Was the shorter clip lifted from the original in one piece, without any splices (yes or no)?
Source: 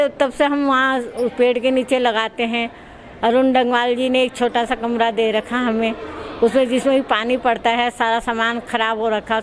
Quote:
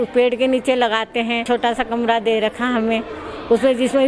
no